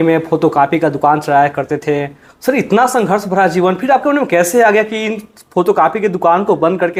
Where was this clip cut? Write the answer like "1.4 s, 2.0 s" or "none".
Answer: none